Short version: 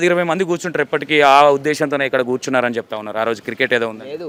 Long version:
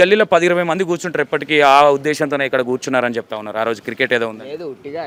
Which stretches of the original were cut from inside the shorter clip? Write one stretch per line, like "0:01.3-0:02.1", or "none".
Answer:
none